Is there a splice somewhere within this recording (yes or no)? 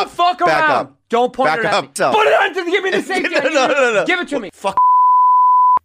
yes